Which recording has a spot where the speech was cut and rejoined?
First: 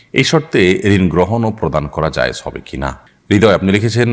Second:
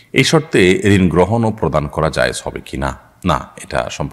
first; 1 cut; at 3.1 s

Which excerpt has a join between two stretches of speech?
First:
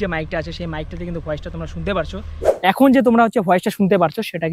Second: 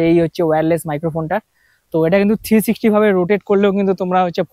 first; 1 cut; at 2.4 s

